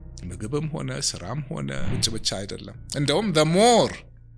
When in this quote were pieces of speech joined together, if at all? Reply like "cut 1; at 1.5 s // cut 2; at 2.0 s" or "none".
cut 1; at 1.9 s